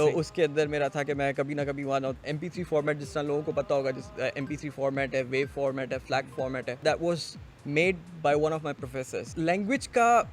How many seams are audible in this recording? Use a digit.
3